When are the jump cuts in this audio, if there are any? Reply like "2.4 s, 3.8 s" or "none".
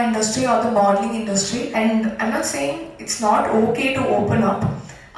1.7 s